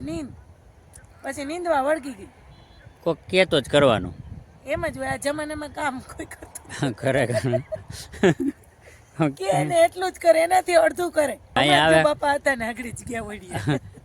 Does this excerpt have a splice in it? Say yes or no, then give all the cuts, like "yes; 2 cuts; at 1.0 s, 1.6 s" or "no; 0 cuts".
yes; 1 cut; at 11.6 s